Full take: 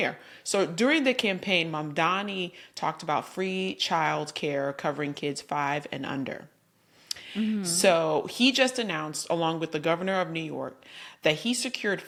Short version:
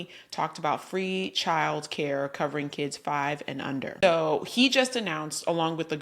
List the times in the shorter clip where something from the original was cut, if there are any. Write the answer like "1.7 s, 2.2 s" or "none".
4.0 s